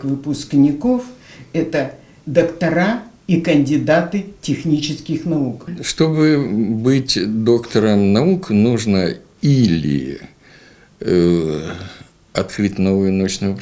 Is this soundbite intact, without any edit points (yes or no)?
no